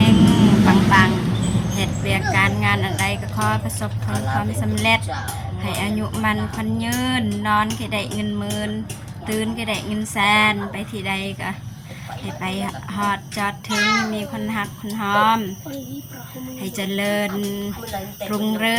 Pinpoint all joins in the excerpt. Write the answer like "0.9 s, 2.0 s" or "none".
none